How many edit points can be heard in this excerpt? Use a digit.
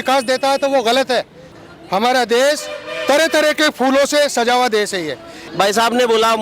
2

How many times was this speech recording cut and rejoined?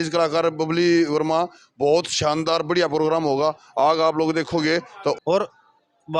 1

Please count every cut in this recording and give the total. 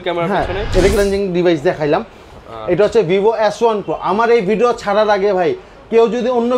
1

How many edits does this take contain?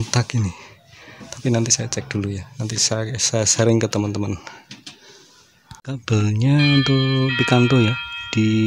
1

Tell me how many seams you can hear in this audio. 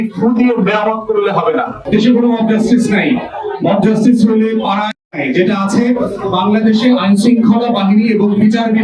1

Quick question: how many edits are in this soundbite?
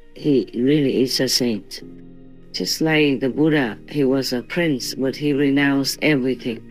1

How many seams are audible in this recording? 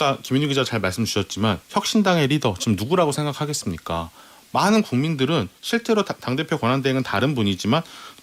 0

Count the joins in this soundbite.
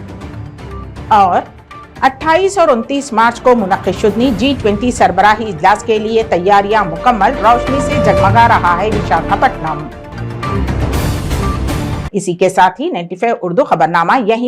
0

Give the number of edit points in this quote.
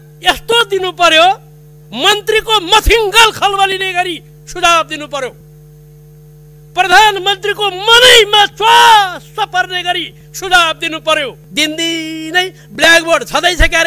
1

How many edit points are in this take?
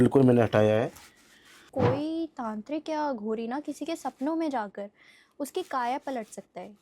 1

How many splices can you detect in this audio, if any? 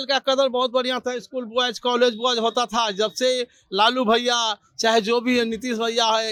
0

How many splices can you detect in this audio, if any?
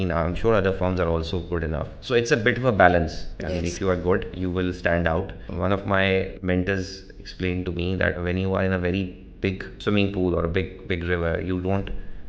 7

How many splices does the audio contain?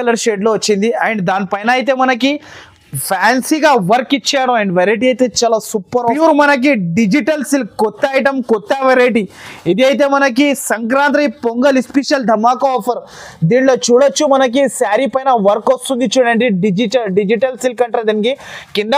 1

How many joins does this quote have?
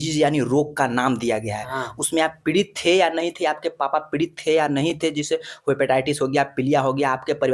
0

